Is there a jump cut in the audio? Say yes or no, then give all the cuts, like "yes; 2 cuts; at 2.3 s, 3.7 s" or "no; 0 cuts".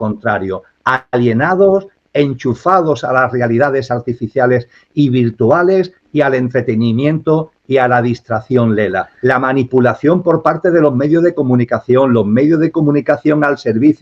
yes; 1 cut; at 9.1 s